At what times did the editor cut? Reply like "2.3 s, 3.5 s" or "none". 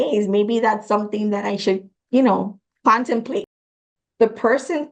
3.6 s